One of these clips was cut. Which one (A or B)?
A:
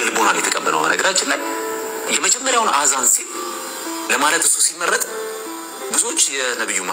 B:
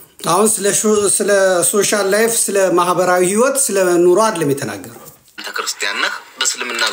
B